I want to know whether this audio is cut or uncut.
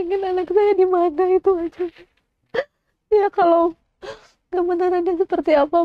uncut